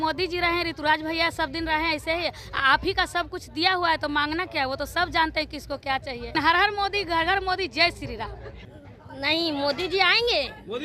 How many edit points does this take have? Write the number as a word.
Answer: two